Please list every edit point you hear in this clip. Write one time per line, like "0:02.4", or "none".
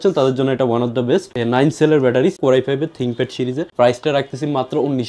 0:02.4
0:03.7